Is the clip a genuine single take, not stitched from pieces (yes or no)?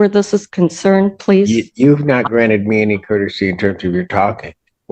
yes